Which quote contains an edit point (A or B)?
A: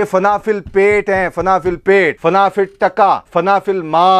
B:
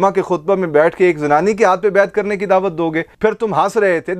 A